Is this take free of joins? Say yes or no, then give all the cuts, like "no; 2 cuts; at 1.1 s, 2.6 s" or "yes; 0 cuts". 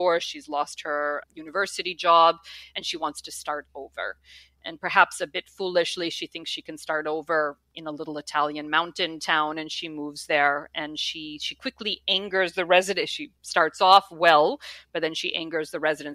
no; 1 cut; at 1.2 s